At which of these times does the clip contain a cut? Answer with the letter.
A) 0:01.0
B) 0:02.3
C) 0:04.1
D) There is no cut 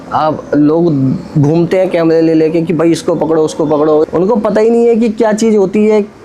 C